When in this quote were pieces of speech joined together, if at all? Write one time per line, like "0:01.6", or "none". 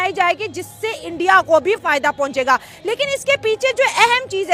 none